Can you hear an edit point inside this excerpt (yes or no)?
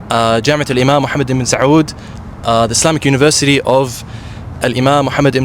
no